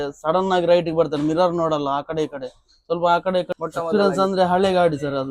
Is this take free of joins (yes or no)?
no